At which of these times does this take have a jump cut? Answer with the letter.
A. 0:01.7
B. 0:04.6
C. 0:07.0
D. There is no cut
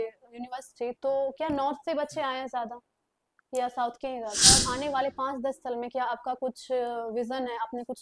B